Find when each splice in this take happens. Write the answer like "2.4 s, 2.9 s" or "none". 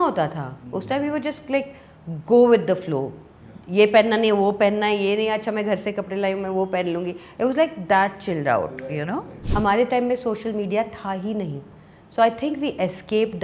9.4 s